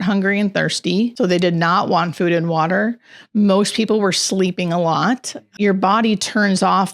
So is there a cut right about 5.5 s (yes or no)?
yes